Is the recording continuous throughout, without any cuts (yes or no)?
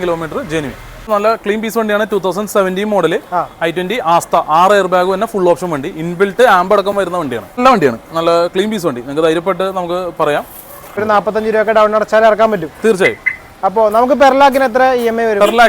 no